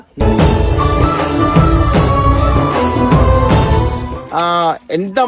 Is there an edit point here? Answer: yes; 1 cut; at 4.2 s

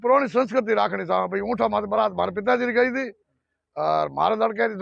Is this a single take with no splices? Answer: yes; 0 cuts

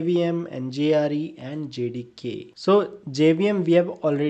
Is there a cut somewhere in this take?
no; 0 cuts

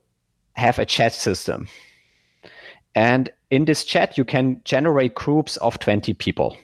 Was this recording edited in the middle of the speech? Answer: no; 0 cuts

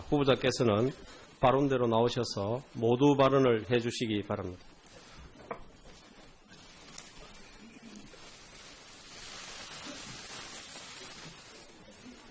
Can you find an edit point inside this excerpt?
yes; 1 cut; at 3.4 s

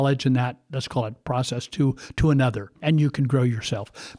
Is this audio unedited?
no; 1 cut; at 2.8 s

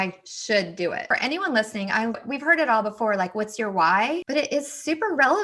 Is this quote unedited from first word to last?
no; 3 cuts; at 1.0 s, 2.2 s, 4.2 s

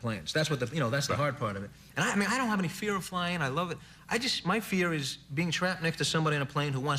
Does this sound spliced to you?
no; 0 cuts

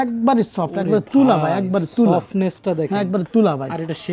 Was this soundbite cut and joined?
no; 0 cuts

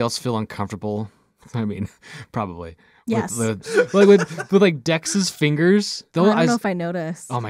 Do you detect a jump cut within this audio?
yes; 2 cuts; at 3.6 s, 6.0 s

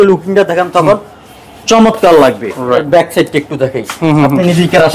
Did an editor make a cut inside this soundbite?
yes; 1 cut; at 2.8 s

